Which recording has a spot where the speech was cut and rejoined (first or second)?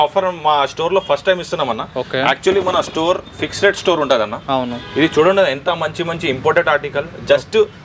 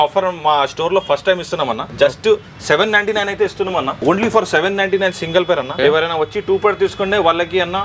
second